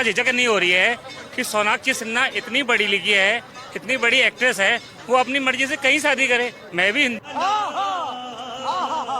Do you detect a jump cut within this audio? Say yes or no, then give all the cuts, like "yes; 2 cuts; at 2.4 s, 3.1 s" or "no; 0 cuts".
no; 0 cuts